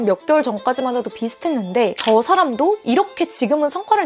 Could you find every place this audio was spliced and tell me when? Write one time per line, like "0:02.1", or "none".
none